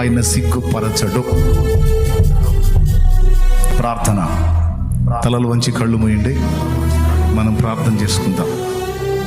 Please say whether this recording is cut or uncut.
uncut